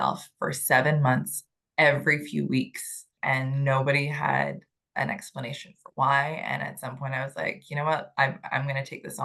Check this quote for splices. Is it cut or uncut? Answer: cut